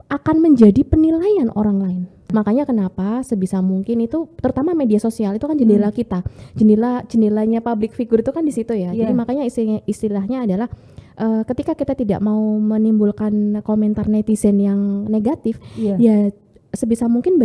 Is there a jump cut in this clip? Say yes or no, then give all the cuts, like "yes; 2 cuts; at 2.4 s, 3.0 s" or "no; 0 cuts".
yes; 1 cut; at 2.3 s